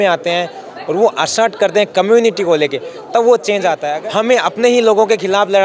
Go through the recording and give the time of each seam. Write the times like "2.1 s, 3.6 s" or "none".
3.9 s